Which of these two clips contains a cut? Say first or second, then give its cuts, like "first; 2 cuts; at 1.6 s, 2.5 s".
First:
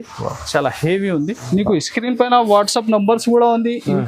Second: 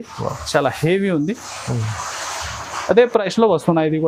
first; 1 cut; at 1.4 s